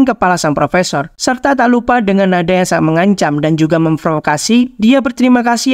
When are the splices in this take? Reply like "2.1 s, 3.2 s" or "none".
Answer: 1.1 s

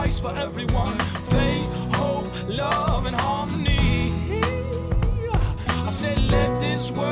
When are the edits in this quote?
none

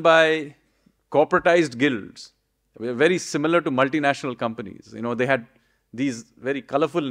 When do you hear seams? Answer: none

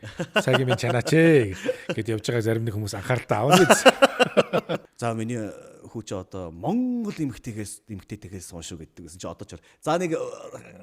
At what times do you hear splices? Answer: 4.9 s

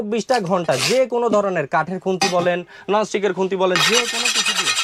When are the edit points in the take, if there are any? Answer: none

